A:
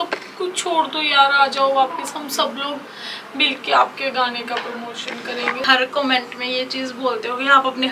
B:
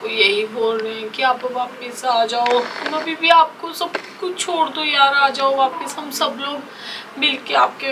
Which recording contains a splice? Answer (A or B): A